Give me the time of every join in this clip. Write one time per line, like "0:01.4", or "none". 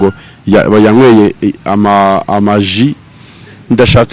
none